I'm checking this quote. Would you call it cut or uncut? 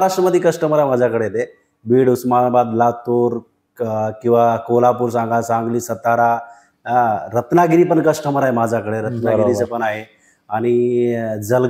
uncut